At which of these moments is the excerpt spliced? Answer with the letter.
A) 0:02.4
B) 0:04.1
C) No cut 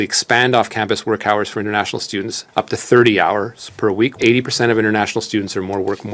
B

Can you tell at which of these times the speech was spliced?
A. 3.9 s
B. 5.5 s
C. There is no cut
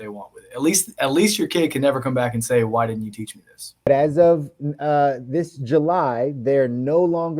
A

